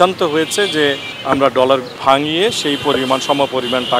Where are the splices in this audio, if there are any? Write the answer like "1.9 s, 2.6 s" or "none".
1.1 s, 1.9 s

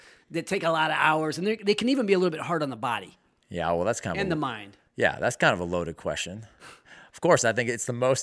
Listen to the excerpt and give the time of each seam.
none

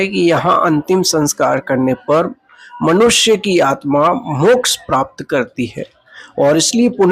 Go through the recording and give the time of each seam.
none

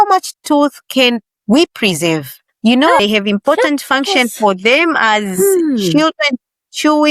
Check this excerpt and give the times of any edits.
3.0 s

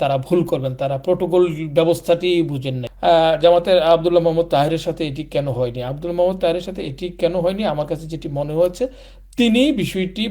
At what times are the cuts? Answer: 2.8 s

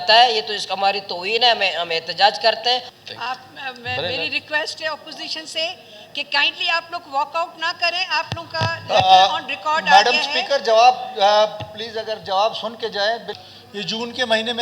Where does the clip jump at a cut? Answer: 2.9 s, 13.3 s

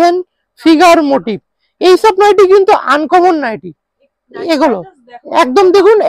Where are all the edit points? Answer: none

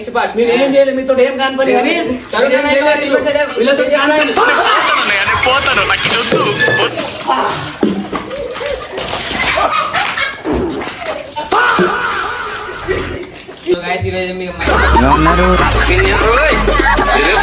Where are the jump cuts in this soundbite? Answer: 13.7 s

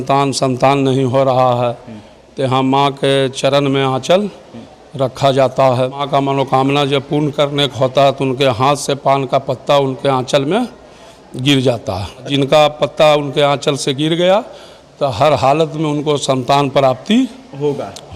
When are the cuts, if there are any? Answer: 6.0 s, 12.3 s

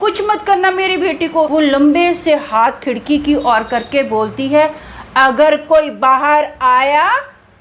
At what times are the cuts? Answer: 1.5 s

